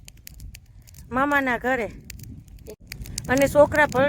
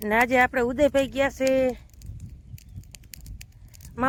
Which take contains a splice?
first; 1 cut; at 2.8 s

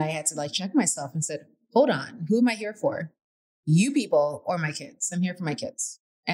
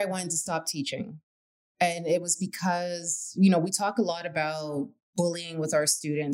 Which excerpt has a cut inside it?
second; 1 cut; at 5.0 s

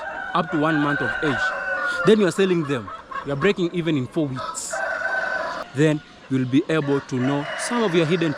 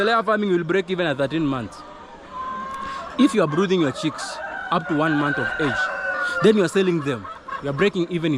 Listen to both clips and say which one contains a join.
first; 1 cut; at 5.6 s

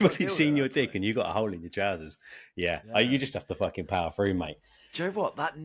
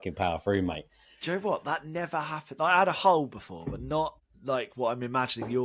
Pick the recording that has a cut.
second; 1 cut; at 4.3 s

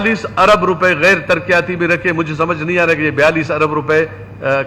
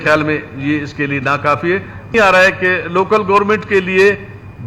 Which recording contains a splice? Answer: second; 1 cut; at 2.1 s

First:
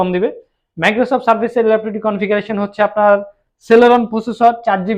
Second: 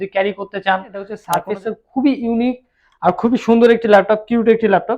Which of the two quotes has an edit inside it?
second; 1 cut; at 1.3 s

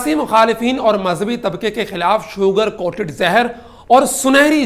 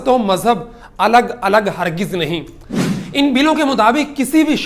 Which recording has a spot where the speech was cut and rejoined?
second; 1 cut; at 2.6 s

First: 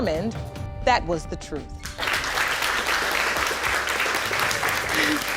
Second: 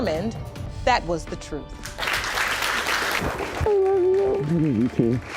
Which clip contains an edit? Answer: second; 1 cut; at 3.2 s

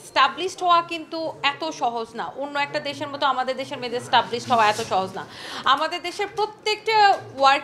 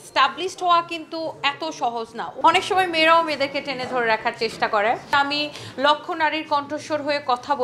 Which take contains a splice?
second; 2 cuts; at 2.3 s, 5.1 s

